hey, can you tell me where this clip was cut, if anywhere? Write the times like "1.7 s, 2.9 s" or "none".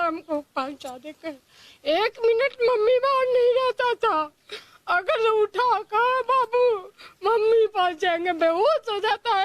none